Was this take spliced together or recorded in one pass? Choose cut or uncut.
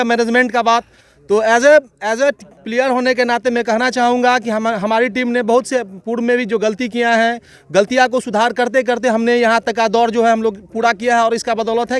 uncut